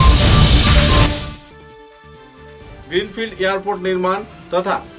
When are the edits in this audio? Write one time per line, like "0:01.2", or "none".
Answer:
0:01.0